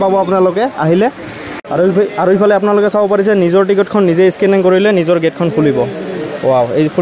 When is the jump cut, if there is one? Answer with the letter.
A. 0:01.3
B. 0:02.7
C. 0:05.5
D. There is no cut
D